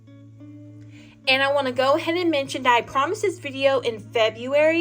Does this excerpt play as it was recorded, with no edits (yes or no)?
no